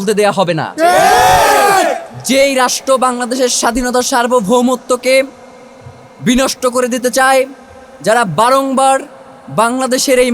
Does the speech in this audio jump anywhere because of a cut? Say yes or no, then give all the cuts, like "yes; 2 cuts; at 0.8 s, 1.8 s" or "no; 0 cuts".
no; 0 cuts